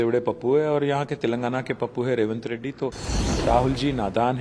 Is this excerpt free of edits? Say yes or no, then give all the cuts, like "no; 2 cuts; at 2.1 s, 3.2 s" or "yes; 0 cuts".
no; 1 cut; at 3.1 s